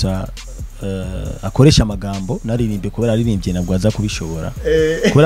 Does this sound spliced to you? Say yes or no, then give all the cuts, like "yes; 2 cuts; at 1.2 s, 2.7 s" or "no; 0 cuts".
no; 0 cuts